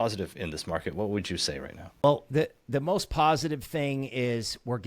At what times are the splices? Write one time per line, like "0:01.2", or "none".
0:02.0